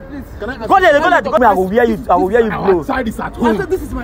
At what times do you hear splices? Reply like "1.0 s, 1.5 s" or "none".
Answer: 1.4 s